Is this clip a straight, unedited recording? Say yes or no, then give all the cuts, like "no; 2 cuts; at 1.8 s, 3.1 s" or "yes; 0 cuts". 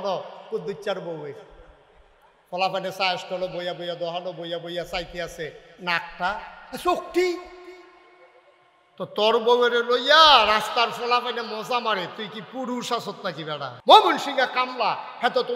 no; 1 cut; at 13.7 s